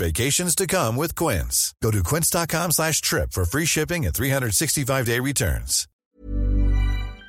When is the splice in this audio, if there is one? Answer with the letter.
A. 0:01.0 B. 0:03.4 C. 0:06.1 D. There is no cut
C